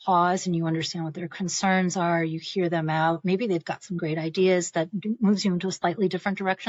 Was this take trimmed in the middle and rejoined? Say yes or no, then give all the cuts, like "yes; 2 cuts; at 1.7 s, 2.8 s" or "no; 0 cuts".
no; 0 cuts